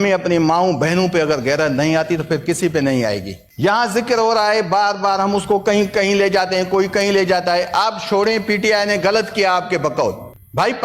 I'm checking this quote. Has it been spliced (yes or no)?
yes